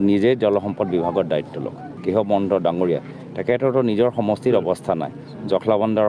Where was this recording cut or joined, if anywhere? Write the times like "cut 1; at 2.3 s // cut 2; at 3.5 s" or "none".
cut 1; at 1.9 s

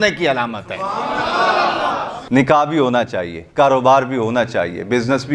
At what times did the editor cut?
cut 1; at 2.1 s

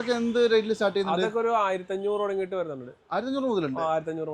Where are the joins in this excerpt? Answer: none

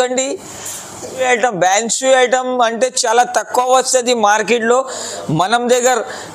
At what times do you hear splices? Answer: cut 1; at 1.2 s

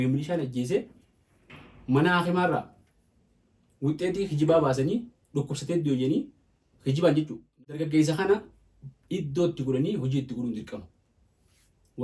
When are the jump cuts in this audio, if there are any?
cut 1; at 7.4 s

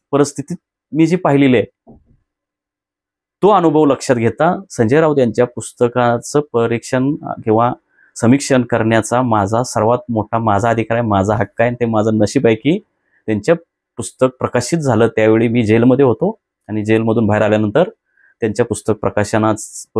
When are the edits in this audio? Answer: none

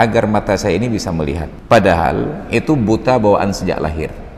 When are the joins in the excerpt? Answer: cut 1; at 1.5 s

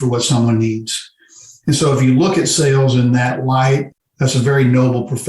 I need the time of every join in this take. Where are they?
cut 1; at 3.8 s

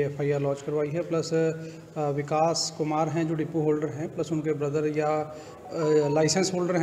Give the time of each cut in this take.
none

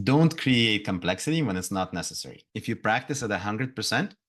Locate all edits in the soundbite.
cut 1; at 2.5 s

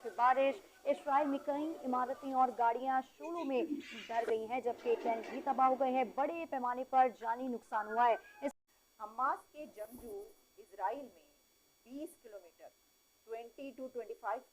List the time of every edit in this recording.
cut 1; at 8.5 s

